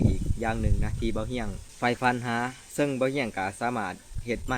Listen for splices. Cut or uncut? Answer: uncut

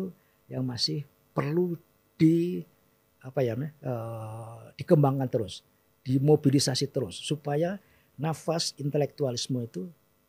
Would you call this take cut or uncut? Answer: uncut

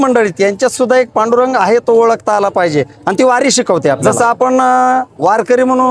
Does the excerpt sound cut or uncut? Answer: cut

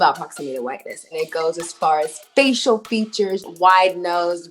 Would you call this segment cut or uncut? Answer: cut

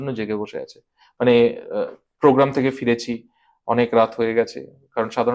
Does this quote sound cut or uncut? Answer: uncut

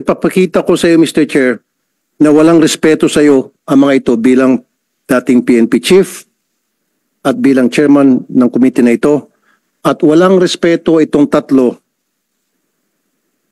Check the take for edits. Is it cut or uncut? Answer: uncut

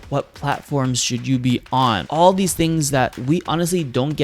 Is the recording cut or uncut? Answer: cut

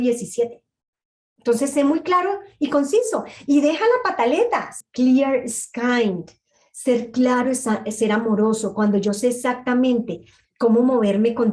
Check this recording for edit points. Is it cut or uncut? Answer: cut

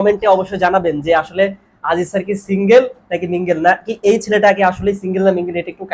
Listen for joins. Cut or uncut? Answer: uncut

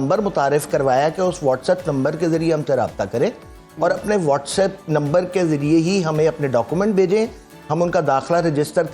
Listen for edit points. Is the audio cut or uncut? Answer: uncut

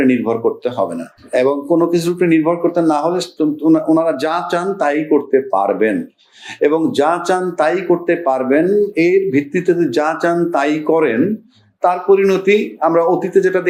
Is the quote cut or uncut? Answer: uncut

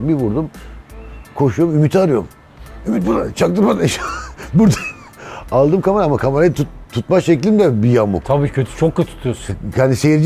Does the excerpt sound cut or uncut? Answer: uncut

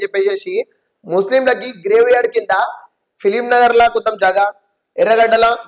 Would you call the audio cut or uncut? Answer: uncut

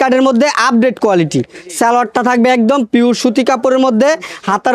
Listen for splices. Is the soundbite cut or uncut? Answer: uncut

